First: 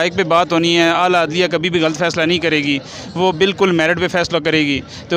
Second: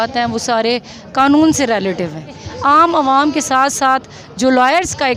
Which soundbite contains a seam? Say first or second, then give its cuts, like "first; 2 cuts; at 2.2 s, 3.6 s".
second; 1 cut; at 2.5 s